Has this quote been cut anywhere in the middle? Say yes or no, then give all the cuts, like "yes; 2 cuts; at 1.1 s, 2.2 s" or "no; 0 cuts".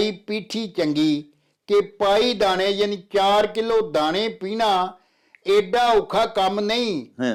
no; 0 cuts